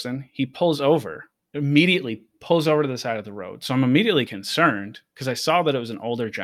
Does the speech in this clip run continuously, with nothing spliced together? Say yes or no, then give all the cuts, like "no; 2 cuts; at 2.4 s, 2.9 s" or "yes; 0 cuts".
yes; 0 cuts